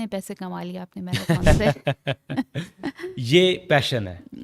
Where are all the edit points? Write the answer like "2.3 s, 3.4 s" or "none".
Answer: none